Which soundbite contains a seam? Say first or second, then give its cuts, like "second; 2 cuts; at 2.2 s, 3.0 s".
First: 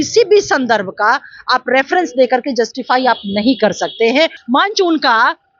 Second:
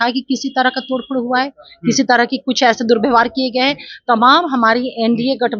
first; 1 cut; at 4.4 s